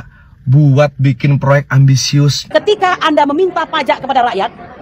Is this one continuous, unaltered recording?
no; 1 cut; at 2.4 s

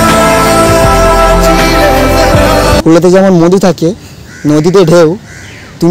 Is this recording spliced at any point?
yes; 1 cut; at 2.8 s

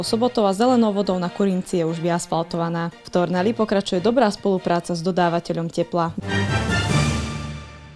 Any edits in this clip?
yes; 1 cut; at 6.1 s

